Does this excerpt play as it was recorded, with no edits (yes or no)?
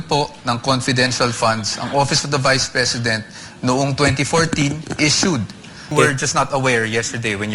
no